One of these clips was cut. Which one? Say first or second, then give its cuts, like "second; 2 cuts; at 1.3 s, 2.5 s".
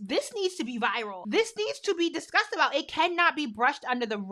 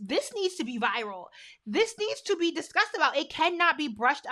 first; 1 cut; at 1.2 s